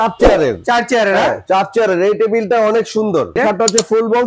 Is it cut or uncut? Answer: cut